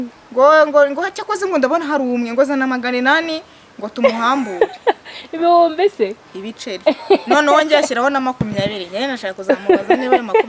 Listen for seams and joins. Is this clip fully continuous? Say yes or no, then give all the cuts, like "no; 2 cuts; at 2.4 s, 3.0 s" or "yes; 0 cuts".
yes; 0 cuts